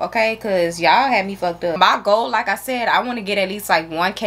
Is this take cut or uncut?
cut